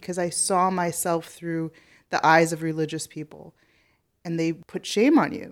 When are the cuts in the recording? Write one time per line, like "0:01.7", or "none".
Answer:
0:04.6